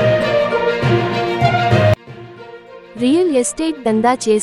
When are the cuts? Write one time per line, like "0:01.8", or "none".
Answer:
0:02.1